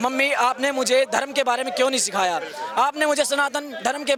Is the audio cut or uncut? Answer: uncut